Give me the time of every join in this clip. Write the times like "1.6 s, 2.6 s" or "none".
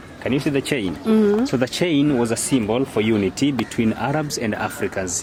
none